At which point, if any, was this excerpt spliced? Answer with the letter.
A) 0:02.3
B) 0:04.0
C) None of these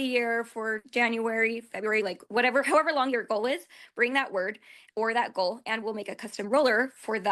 C